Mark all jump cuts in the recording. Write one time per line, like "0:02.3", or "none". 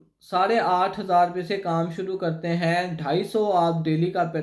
none